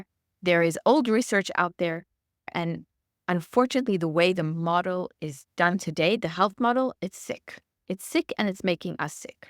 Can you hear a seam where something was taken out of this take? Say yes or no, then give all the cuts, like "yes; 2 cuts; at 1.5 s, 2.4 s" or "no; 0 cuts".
yes; 2 cuts; at 2.5 s, 5.1 s